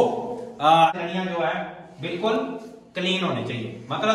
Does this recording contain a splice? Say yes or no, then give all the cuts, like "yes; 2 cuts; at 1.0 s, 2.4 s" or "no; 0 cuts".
yes; 1 cut; at 0.9 s